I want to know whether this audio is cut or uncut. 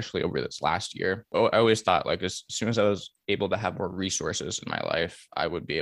cut